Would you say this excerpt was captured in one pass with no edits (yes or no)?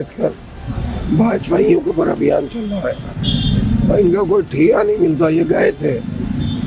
yes